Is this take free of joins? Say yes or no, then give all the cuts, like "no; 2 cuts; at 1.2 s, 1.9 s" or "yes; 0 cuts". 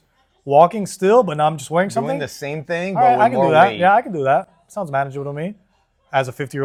yes; 0 cuts